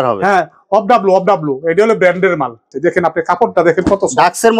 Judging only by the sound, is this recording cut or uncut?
cut